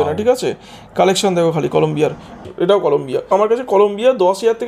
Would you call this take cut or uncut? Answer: cut